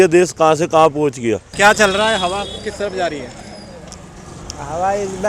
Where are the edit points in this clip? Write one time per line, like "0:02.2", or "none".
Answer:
0:01.5